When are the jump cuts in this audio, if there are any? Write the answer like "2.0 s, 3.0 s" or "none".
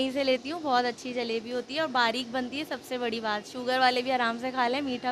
none

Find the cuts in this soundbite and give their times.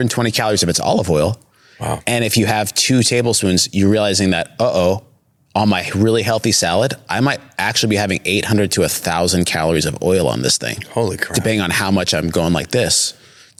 none

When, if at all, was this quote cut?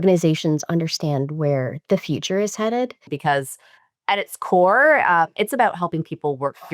3.1 s

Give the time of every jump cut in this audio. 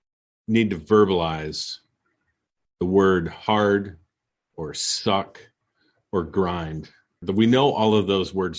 7.2 s

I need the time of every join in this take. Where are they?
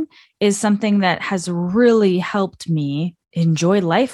3.2 s

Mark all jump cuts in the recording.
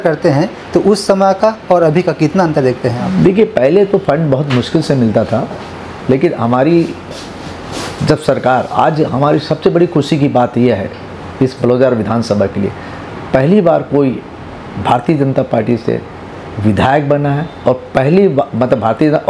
none

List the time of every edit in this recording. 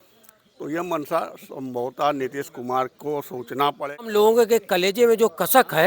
4.0 s

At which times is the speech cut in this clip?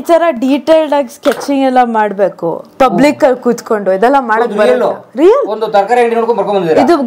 none

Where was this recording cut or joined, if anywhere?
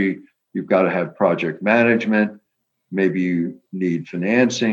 none

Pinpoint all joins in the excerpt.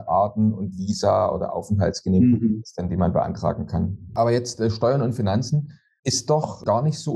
4.0 s

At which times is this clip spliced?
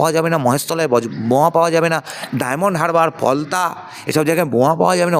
none

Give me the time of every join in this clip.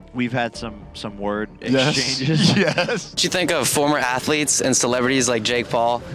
3.1 s

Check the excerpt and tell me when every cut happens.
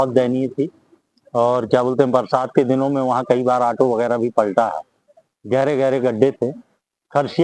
none

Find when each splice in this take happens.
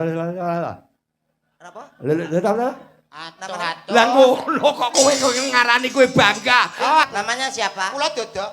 7.1 s

